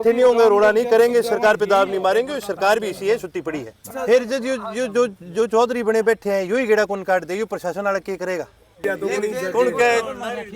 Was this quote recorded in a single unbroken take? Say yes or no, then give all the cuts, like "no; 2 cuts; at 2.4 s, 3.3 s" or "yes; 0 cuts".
no; 2 cuts; at 3.8 s, 8.8 s